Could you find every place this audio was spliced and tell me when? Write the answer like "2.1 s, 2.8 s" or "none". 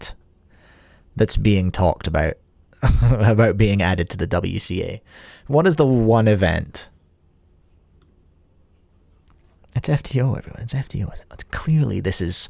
none